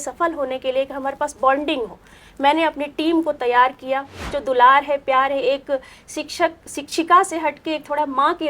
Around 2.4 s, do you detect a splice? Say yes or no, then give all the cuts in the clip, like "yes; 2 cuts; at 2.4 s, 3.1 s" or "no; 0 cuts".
no; 1 cut; at 4.3 s